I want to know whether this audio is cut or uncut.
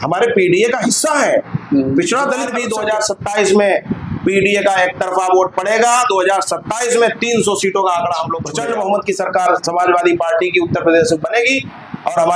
cut